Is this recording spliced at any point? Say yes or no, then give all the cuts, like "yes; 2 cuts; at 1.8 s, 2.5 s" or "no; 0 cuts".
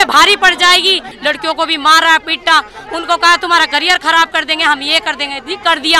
yes; 1 cut; at 1.1 s